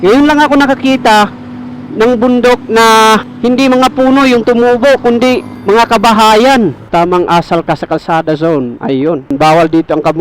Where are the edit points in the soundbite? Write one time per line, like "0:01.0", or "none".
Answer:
0:06.9
0:09.3